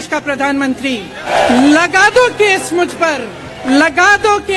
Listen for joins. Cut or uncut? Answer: cut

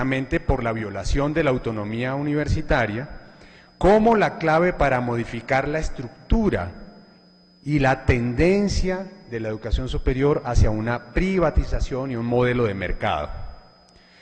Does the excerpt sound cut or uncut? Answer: uncut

